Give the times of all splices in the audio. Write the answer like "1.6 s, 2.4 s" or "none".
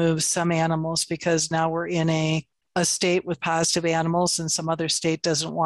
2.6 s

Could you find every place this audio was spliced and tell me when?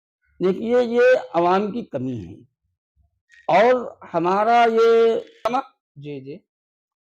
5.4 s

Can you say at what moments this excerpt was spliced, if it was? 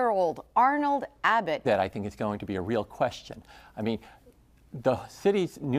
none

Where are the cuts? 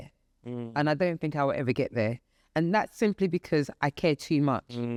none

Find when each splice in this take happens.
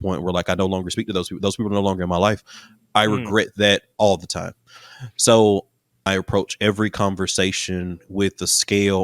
6.0 s

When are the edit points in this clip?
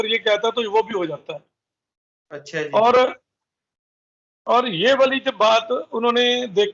none

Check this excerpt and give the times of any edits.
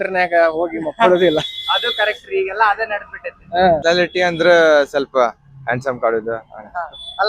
3.8 s

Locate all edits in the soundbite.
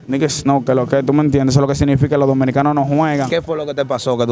3.3 s

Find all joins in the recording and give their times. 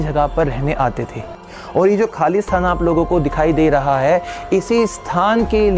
1.5 s

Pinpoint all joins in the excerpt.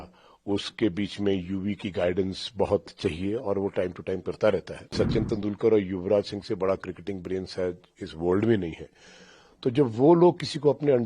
4.9 s

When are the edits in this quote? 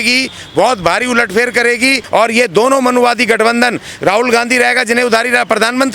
2.0 s

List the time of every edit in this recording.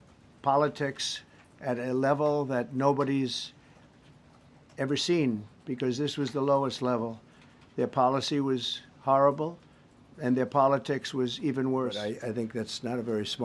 12.0 s

